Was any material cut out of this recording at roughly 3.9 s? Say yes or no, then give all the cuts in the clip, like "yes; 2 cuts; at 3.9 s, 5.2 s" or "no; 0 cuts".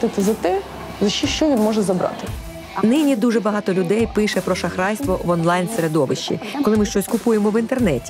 no; 2 cuts; at 2.4 s, 6.5 s